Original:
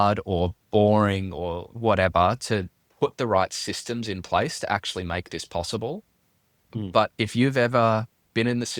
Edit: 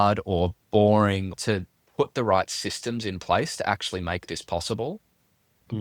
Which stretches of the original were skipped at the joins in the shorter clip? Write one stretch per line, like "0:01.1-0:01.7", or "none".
0:01.4-0:02.4